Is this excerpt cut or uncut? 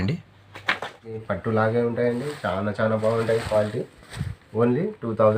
cut